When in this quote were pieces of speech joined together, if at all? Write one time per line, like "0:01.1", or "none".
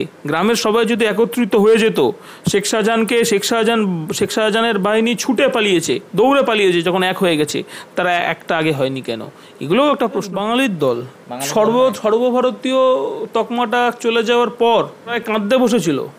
0:10.3
0:15.2